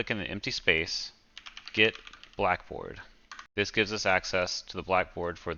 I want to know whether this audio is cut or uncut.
uncut